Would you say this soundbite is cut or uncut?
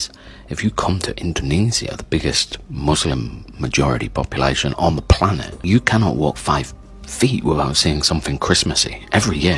uncut